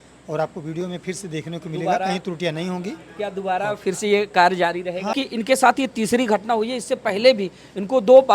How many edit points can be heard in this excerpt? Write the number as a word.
one